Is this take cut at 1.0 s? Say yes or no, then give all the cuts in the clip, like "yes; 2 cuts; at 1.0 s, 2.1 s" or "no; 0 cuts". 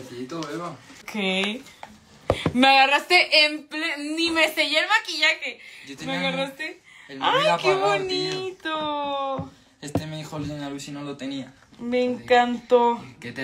yes; 1 cut; at 1.0 s